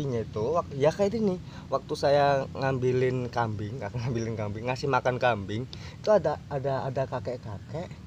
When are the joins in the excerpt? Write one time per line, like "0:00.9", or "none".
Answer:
0:03.9
0:05.7